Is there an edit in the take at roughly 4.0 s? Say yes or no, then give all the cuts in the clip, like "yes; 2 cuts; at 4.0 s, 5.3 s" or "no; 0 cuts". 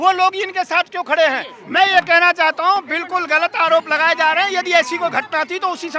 no; 1 cut; at 1.6 s